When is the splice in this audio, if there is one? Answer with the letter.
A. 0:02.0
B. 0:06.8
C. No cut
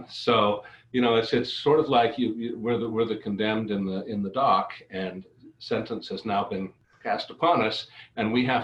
B